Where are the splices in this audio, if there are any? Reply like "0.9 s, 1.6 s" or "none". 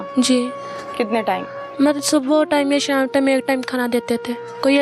none

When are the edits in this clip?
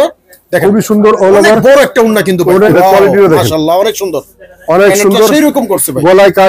2.7 s

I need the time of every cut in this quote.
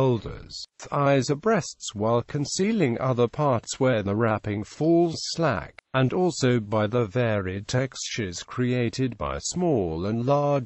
7.0 s

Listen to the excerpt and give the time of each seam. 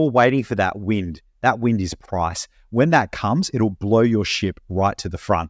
none

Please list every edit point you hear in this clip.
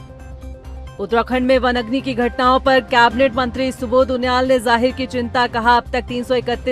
1.0 s

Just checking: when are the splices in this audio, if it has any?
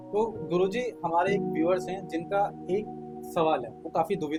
none

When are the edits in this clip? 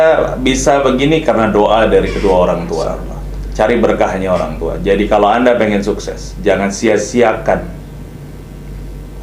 none

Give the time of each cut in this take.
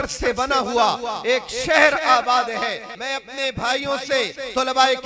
2.9 s

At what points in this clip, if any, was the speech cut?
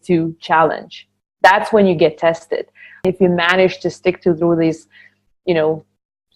3.1 s

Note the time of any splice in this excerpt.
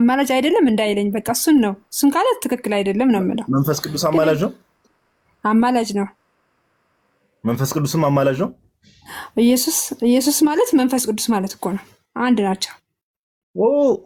none

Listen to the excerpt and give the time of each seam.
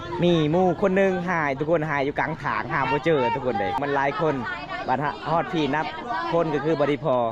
3.8 s

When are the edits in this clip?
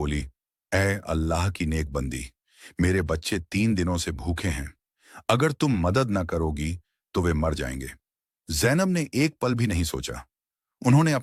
none

